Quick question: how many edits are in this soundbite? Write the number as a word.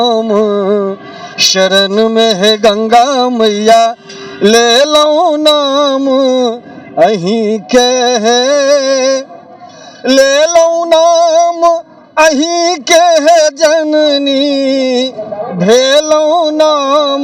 zero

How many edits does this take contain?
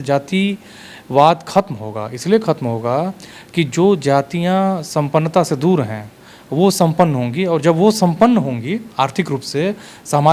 zero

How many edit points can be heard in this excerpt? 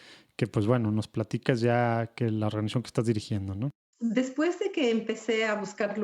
one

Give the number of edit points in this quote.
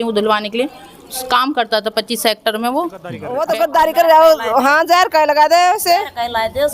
one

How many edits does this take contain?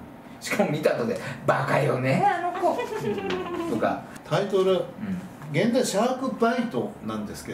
one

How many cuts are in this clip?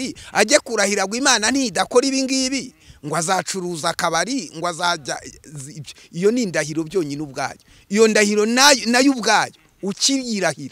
zero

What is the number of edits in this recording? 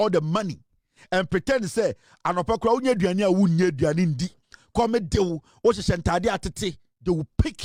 zero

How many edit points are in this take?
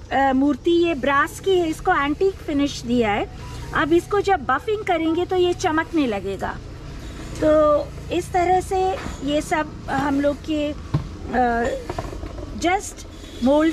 zero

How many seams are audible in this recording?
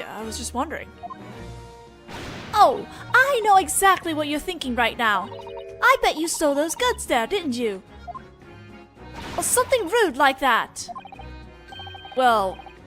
one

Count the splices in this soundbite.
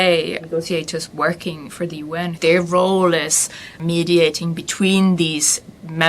two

